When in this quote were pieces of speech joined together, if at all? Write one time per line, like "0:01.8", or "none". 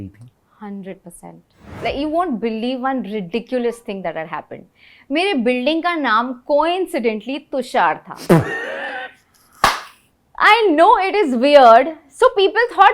0:01.7